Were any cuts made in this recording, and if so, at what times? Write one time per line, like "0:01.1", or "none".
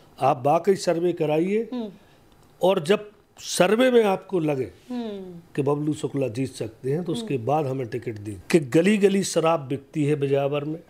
0:08.3